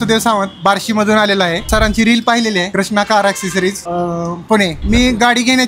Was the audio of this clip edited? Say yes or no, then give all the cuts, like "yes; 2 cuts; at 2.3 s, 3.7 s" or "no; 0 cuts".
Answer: yes; 4 cuts; at 1.7 s, 2.7 s, 3.8 s, 4.8 s